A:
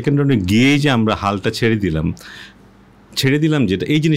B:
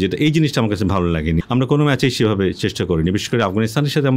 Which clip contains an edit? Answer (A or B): B